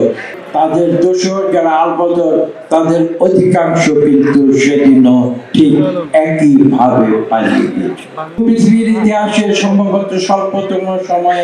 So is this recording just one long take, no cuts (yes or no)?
no